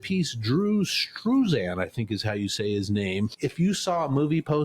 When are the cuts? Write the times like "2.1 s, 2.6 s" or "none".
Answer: 3.3 s